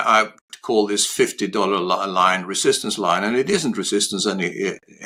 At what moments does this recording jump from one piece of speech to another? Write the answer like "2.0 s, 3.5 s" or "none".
none